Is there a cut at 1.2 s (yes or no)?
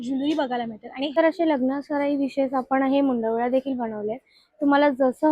yes